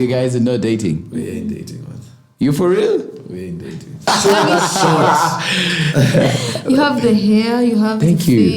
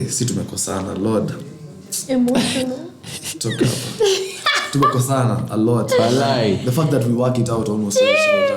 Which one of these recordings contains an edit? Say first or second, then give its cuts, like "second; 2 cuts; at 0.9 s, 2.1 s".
first; 1 cut; at 4.1 s